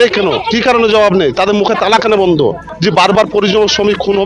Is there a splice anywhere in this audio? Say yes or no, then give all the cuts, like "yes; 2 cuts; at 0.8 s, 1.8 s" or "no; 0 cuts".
yes; 1 cut; at 2.7 s